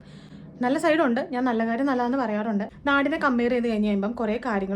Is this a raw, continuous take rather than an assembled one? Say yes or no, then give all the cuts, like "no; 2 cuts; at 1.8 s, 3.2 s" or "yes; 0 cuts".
no; 1 cut; at 2.7 s